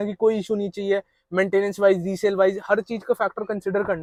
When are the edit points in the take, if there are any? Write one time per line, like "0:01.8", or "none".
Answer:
none